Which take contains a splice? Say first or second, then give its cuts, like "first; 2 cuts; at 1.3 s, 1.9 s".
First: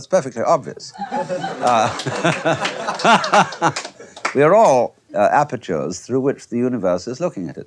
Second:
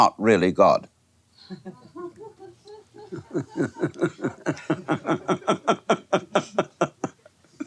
second; 1 cut; at 2.4 s